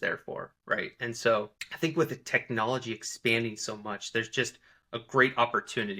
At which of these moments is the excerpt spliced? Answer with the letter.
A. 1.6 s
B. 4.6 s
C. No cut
A